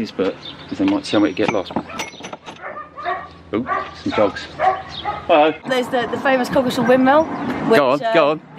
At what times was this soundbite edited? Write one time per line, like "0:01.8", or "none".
0:05.6